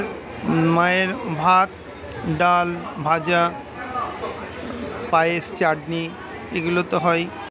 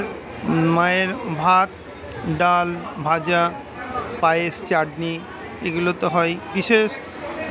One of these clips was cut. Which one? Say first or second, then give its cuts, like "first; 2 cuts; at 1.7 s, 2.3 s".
second; 2 cuts; at 4.0 s, 6.5 s